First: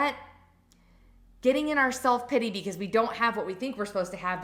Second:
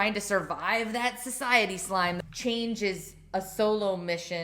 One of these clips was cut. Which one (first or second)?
second